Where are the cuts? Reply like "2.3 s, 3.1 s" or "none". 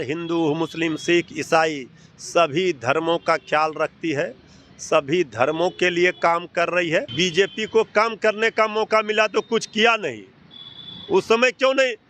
7.1 s